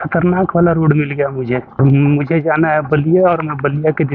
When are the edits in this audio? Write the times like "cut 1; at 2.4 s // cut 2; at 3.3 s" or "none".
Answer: cut 1; at 1.8 s